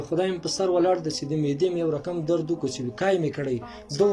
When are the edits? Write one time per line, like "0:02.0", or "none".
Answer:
none